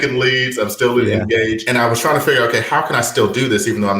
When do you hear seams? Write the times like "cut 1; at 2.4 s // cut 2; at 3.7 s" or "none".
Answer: cut 1; at 1.6 s